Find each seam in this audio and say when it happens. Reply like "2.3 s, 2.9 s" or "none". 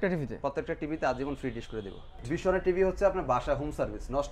2.2 s